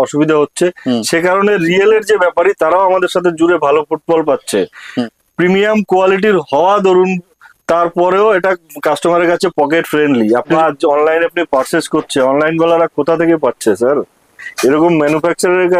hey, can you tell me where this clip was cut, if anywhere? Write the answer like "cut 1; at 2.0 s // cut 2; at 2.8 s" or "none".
cut 1; at 4.9 s // cut 2; at 10.5 s